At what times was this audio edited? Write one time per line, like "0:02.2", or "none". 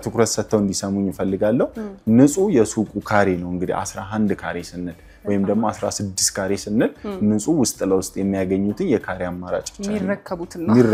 none